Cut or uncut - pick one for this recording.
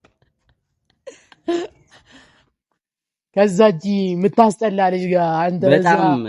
uncut